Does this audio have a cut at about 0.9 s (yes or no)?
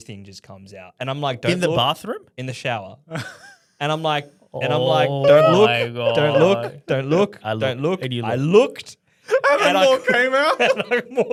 no